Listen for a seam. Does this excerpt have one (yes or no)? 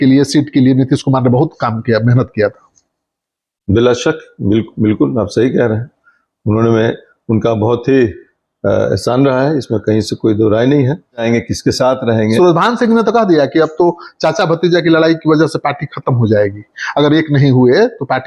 yes